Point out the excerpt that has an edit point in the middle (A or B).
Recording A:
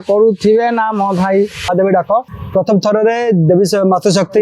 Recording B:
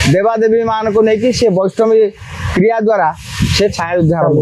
A